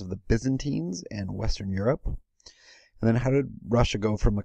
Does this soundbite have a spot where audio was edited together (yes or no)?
no